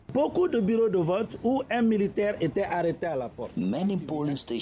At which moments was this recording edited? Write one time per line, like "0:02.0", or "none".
none